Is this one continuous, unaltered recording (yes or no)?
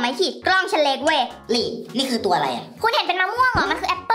no